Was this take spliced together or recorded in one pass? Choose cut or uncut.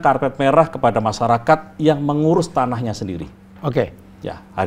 uncut